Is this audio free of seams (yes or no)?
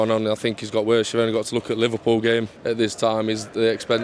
no